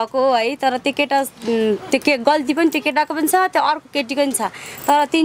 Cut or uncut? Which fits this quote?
uncut